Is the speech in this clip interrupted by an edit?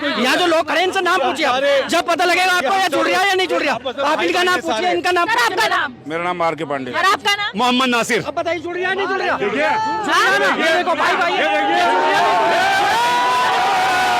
no; 0 cuts

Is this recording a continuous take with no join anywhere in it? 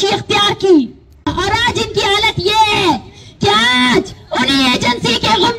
no; 1 cut; at 1.3 s

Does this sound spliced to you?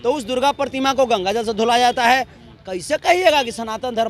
no; 0 cuts

